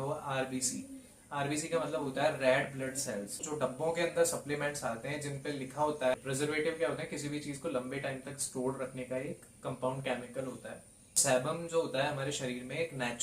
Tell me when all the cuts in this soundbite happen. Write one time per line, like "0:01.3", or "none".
0:03.4
0:06.1
0:11.0